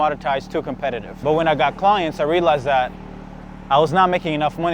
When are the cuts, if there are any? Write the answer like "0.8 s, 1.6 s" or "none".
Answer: 1.1 s